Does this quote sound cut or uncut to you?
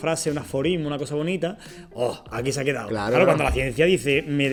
uncut